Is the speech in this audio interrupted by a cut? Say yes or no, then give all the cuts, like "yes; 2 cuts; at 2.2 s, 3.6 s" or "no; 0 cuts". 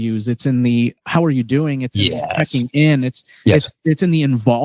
no; 0 cuts